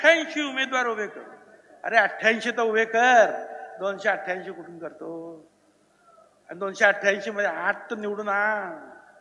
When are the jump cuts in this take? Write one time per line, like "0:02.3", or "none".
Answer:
none